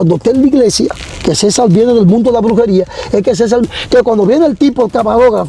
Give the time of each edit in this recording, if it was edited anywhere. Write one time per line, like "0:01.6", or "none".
0:03.6